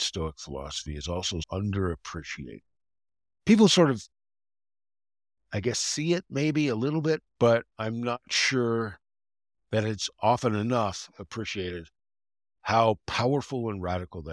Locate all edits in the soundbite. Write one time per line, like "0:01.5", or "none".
0:01.5
0:07.3